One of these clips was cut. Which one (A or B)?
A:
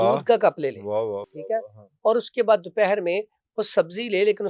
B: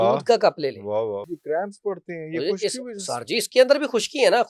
B